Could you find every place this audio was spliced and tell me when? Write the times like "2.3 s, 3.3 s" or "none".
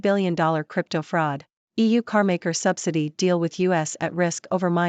1.6 s